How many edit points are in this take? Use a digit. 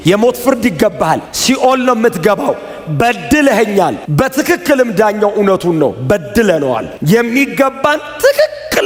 0